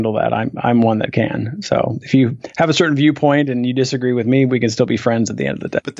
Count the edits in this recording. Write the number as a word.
zero